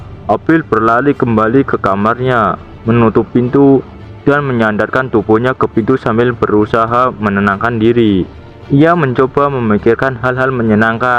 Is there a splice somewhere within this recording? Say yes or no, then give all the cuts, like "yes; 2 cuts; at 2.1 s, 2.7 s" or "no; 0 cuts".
no; 0 cuts